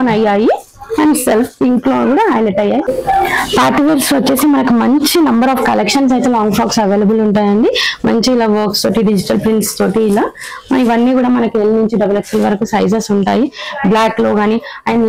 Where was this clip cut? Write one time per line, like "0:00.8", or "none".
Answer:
0:02.9